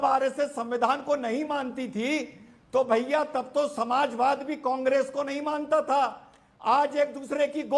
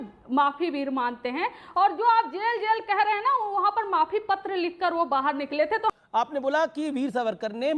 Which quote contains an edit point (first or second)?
second